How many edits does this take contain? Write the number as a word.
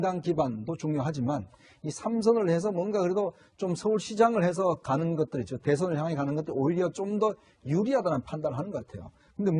one